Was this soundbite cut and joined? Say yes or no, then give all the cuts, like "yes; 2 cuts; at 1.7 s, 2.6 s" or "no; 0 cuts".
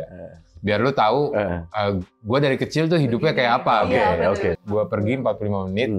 yes; 1 cut; at 4.6 s